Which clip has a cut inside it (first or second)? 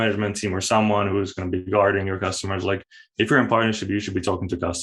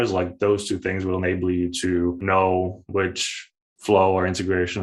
second